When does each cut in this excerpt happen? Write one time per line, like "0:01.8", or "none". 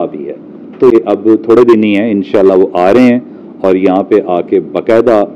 0:00.9

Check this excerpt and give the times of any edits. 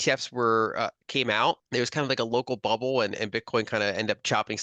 0:01.6

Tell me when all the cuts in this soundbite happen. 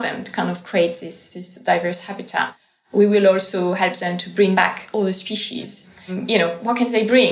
0:04.6
0:06.2

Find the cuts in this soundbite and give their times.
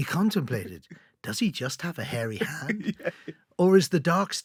none

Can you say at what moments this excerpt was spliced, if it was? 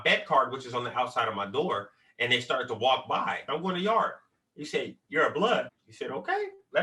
0:03.4
0:05.5

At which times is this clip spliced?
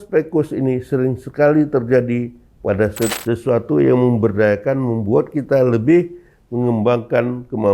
0:03.1

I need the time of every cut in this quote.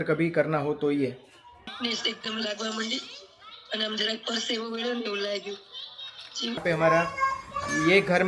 0:01.5
0:06.6

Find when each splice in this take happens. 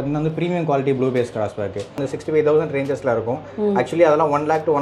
0:02.0

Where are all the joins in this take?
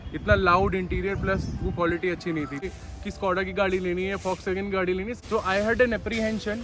0:02.7
0:05.1

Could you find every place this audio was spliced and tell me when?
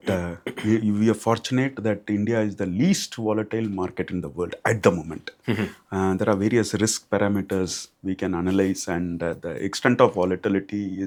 none

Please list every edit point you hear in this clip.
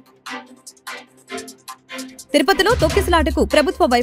none

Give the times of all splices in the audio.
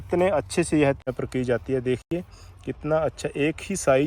0:01.0

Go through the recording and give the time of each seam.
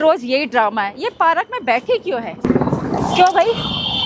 0:02.5

